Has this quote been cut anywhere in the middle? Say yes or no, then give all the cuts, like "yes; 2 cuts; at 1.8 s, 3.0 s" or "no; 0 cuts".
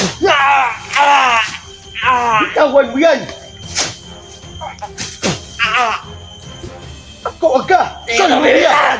no; 0 cuts